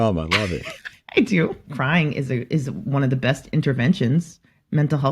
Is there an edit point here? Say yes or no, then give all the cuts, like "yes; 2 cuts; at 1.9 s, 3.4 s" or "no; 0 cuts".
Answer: yes; 1 cut; at 1.6 s